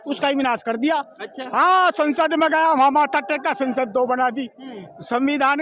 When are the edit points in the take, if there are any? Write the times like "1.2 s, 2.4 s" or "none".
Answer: none